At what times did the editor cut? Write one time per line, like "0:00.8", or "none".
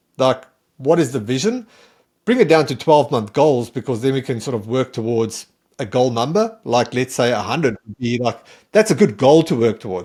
none